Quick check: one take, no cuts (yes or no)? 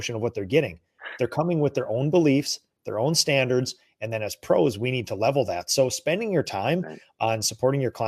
yes